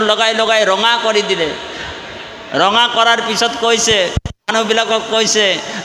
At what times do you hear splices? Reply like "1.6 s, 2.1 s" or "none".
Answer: none